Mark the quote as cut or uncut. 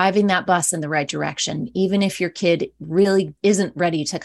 cut